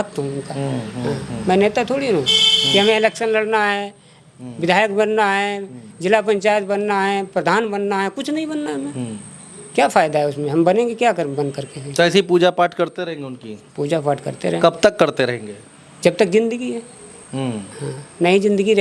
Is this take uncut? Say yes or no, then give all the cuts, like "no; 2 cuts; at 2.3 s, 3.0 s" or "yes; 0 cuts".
yes; 0 cuts